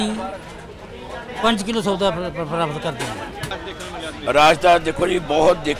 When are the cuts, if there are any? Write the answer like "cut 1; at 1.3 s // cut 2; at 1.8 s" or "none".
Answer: cut 1; at 3.5 s